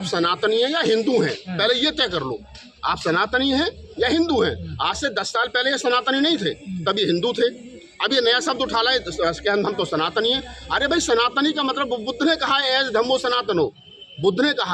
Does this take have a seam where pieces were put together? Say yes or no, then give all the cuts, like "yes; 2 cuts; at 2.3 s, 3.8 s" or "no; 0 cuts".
no; 0 cuts